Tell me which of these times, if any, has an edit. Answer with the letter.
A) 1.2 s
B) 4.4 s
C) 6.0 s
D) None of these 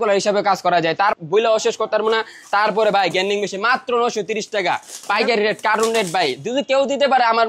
A